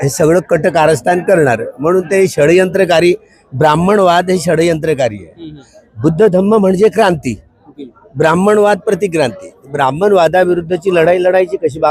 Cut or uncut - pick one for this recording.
uncut